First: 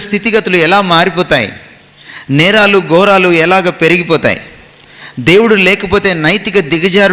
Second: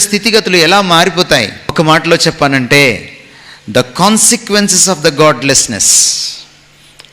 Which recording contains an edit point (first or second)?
second